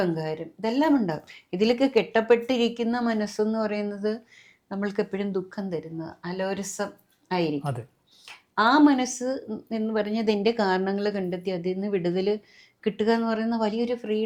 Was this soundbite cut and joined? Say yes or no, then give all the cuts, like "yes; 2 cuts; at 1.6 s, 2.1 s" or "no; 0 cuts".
no; 0 cuts